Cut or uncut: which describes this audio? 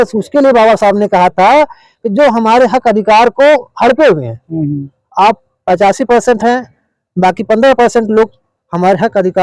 uncut